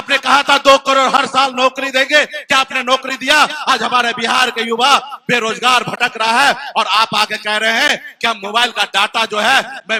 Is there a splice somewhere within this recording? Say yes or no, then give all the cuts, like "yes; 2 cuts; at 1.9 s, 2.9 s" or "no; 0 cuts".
no; 0 cuts